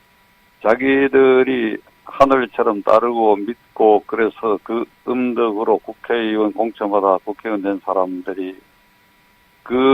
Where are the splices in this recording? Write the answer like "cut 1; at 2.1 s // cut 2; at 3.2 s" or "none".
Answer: cut 1; at 8.0 s

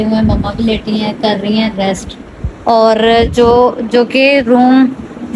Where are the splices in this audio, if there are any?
none

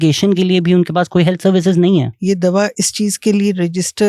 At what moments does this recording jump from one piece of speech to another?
cut 1; at 2.1 s

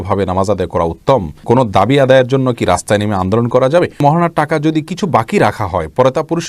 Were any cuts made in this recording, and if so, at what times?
cut 1; at 1.4 s // cut 2; at 4.0 s

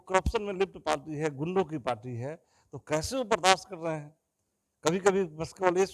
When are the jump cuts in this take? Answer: none

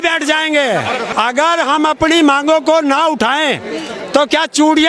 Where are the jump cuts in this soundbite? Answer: cut 1; at 1.1 s

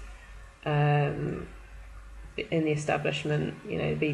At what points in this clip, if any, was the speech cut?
cut 1; at 1.0 s

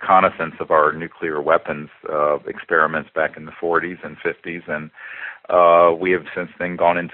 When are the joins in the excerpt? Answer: cut 1; at 4.7 s

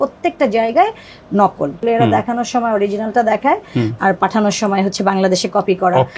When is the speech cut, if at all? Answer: cut 1; at 1.8 s

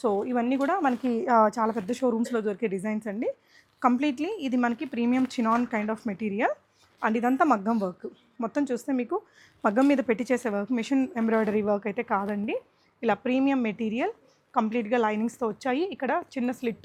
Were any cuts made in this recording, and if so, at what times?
none

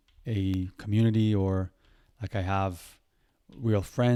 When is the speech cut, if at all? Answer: none

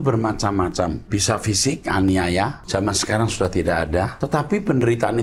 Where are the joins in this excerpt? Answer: cut 1; at 1.0 s // cut 2; at 2.6 s // cut 3; at 4.1 s

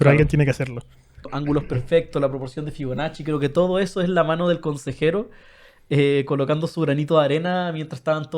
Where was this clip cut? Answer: cut 1; at 1.3 s

